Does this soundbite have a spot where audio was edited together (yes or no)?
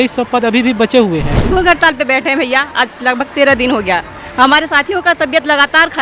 yes